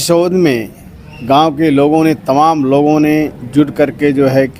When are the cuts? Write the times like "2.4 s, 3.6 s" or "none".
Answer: none